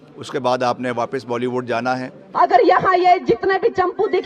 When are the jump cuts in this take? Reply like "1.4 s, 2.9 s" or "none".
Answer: 2.2 s